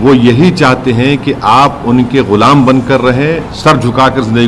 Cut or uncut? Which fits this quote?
cut